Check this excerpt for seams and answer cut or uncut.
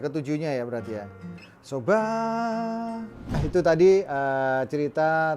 cut